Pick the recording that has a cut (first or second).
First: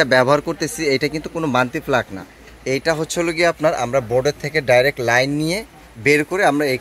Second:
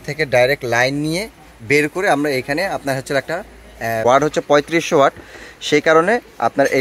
second